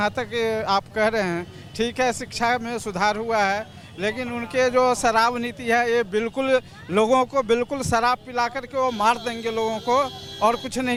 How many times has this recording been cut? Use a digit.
0